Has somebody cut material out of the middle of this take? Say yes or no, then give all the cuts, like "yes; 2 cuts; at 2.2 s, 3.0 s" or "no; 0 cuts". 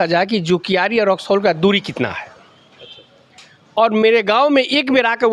no; 0 cuts